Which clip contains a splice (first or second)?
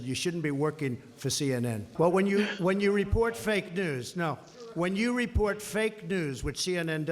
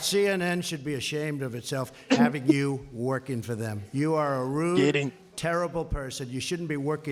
first